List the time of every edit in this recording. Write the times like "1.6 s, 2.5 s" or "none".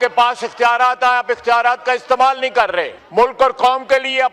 2.9 s